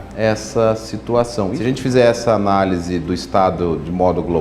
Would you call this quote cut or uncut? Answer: cut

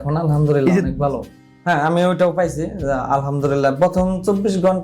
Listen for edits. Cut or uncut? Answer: cut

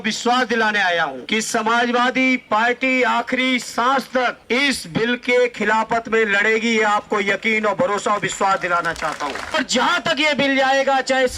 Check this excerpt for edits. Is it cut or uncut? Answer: cut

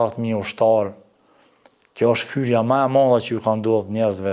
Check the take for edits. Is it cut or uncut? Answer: uncut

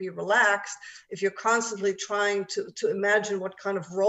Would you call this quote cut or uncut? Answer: uncut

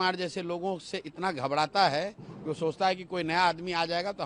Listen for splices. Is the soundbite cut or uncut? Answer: uncut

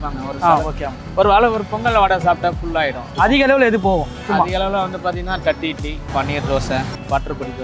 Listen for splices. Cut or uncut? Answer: cut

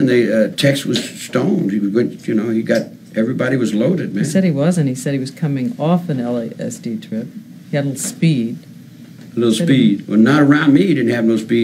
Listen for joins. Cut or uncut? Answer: cut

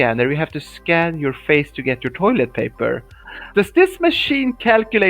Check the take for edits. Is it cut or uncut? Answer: cut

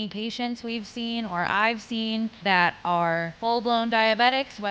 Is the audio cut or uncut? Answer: cut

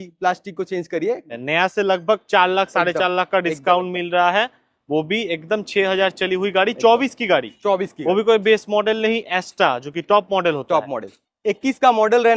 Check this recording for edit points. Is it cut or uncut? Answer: cut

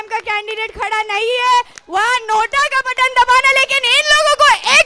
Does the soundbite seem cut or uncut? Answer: uncut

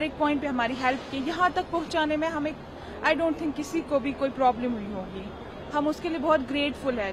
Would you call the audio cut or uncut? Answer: uncut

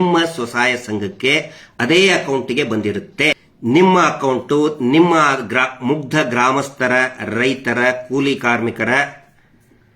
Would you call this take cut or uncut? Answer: cut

